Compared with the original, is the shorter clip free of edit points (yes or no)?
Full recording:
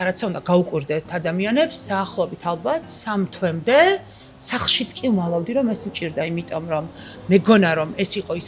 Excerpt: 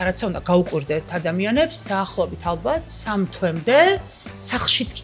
yes